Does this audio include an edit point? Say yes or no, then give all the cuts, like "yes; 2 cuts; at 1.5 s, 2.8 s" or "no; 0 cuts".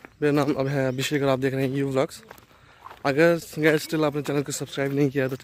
no; 0 cuts